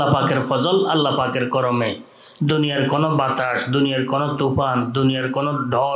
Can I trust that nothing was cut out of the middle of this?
yes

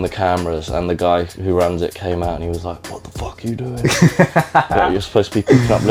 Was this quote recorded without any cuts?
yes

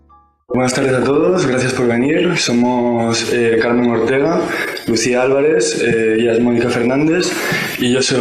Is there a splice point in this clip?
yes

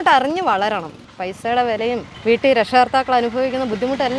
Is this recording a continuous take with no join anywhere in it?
no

